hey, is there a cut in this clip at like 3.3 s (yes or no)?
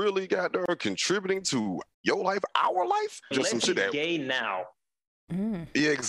yes